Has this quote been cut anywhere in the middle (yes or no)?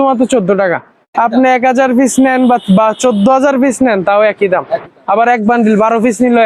yes